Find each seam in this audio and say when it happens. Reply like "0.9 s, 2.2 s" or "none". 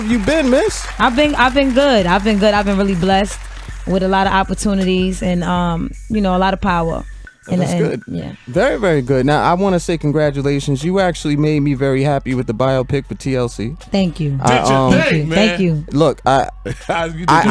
none